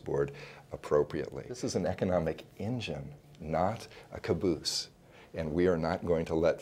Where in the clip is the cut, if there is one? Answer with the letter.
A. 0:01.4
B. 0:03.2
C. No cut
A